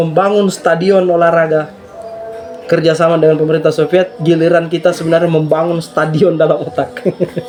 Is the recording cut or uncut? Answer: uncut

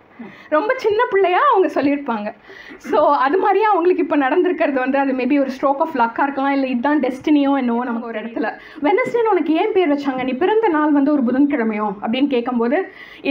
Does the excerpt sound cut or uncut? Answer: cut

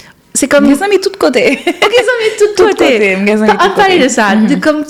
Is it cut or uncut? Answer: uncut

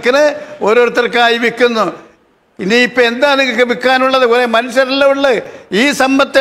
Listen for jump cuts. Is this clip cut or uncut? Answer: uncut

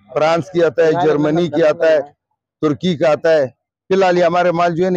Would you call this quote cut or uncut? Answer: uncut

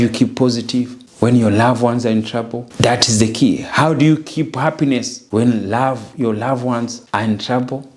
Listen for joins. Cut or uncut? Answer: cut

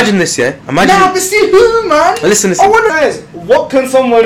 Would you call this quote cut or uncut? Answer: cut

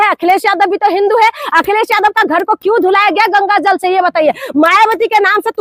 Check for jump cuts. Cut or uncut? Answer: uncut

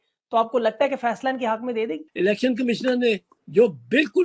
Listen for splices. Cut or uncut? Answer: cut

